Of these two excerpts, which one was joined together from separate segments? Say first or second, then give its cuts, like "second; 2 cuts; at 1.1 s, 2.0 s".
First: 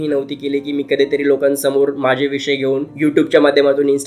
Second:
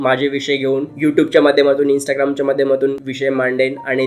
second; 1 cut; at 3.1 s